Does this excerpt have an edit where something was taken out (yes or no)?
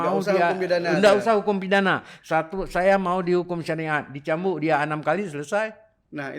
no